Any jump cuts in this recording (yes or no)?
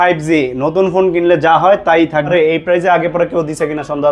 yes